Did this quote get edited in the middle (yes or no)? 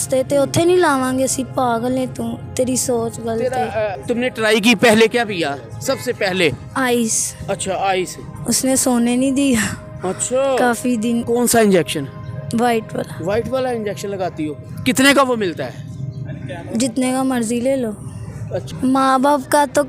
yes